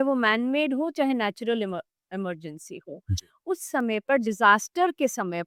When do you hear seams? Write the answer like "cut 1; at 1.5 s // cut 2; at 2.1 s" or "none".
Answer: none